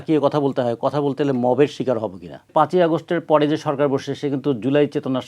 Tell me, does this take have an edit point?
yes; 1 cut; at 2.5 s

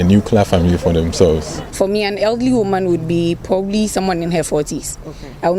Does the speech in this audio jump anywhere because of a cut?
yes; 1 cut; at 1.6 s

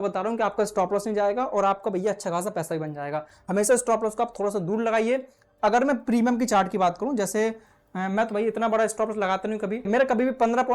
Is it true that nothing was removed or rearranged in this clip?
yes; 0 cuts

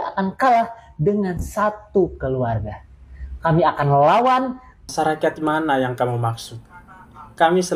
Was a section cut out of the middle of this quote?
yes; 1 cut; at 3.3 s

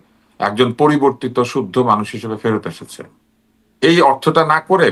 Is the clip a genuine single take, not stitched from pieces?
yes; 0 cuts

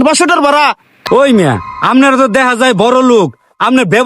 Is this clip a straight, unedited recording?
no; 1 cut; at 0.9 s

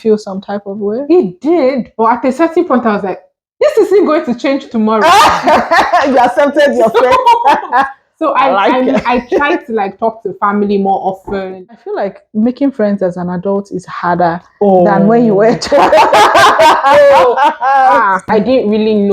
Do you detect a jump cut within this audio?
yes; 2 cuts; at 11.7 s, 18.3 s

